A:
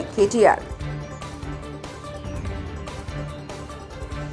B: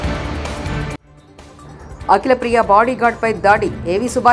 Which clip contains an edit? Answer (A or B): B